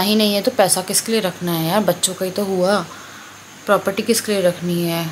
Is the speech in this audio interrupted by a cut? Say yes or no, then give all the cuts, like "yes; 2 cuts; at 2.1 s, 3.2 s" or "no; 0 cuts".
no; 0 cuts